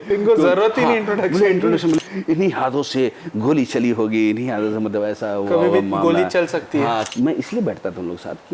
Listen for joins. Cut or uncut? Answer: cut